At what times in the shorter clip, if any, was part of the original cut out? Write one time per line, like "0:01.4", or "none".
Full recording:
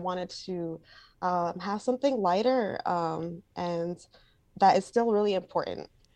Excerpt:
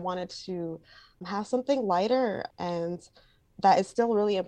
0:01.2
0:02.4